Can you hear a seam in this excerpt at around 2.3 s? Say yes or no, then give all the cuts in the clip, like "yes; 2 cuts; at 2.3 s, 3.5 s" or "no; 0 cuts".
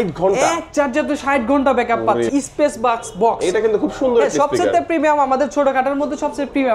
yes; 1 cut; at 2.3 s